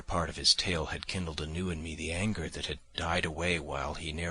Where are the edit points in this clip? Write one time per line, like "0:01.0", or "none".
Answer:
0:02.6